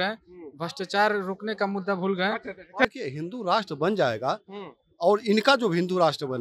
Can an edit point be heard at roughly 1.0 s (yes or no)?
no